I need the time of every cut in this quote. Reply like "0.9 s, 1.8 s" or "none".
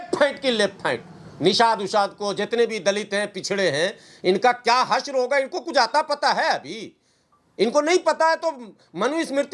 none